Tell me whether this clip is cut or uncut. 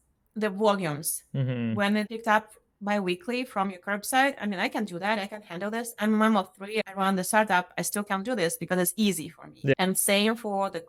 uncut